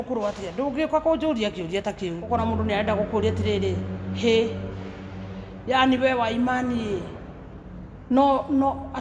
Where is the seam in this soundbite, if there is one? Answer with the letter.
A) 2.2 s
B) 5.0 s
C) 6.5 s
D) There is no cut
A